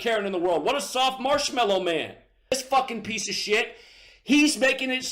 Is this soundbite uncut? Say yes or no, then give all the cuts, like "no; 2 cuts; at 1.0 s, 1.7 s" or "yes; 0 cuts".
no; 1 cut; at 2.5 s